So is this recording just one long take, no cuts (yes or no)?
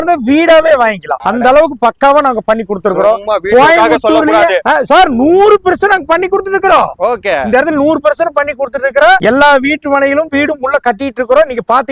yes